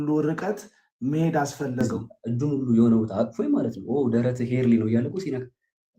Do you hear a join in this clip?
yes; 1 cut; at 1.8 s

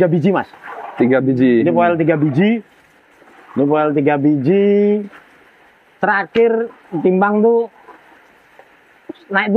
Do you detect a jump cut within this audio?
no; 0 cuts

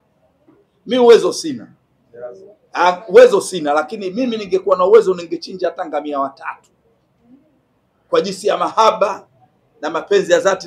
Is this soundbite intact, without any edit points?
yes; 0 cuts

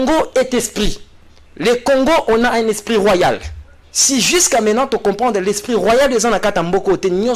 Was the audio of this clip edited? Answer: no; 0 cuts

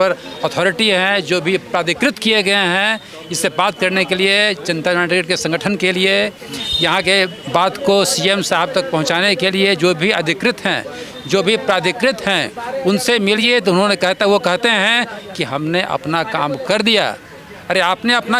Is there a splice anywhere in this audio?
no; 0 cuts

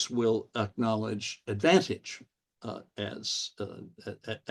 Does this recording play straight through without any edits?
yes; 0 cuts

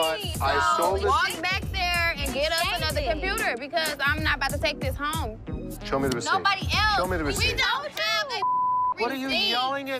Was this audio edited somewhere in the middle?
no; 0 cuts

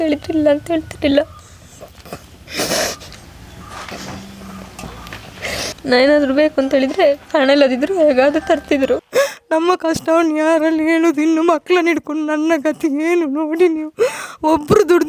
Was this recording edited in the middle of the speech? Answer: yes; 2 cuts; at 5.8 s, 9.1 s

